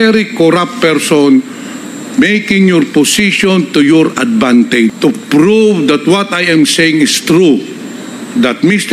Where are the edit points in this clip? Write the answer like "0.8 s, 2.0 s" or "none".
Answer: 4.9 s